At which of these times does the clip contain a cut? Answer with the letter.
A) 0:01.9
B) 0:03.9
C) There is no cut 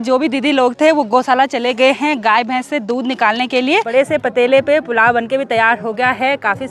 B